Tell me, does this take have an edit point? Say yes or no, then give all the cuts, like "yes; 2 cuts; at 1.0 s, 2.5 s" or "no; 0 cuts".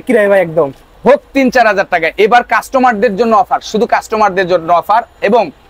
no; 0 cuts